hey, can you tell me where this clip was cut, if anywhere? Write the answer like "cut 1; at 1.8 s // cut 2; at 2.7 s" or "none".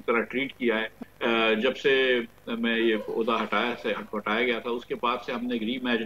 cut 1; at 1.0 s